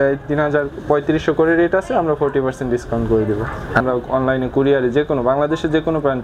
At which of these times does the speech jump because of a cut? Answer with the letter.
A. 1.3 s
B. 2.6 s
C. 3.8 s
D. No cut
C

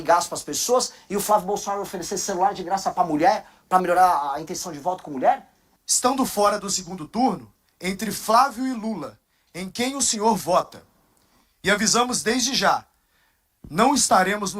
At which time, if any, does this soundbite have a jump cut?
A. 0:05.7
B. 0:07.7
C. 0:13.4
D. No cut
A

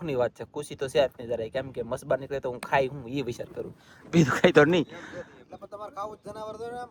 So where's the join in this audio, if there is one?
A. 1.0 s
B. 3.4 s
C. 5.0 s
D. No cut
D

